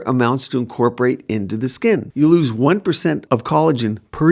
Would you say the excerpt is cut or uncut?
cut